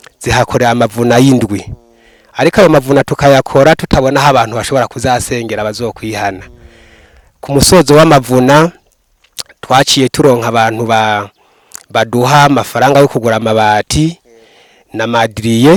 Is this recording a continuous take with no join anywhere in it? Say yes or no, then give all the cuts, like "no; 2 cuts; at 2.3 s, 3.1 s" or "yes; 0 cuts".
yes; 0 cuts